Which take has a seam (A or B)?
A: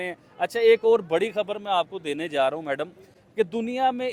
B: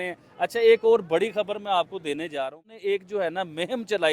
B